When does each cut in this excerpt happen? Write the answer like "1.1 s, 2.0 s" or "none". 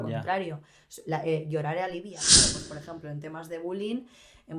2.5 s